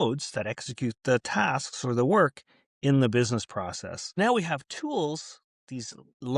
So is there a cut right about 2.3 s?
no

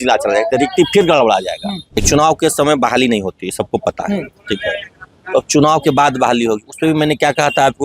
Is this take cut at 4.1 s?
no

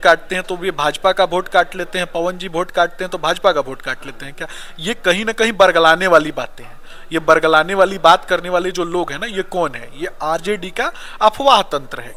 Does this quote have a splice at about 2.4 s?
no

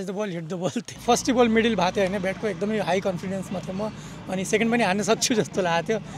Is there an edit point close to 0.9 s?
yes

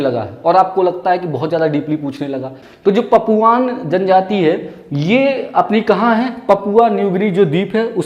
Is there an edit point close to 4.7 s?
no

